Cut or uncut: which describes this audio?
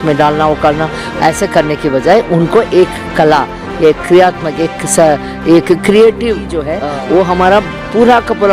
cut